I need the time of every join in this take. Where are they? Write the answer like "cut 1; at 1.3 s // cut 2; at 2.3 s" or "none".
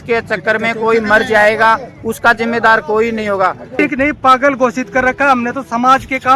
cut 1; at 3.8 s